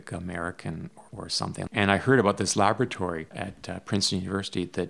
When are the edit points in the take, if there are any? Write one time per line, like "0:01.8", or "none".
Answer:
0:01.7
0:03.3